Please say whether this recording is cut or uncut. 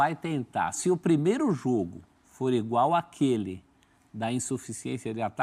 uncut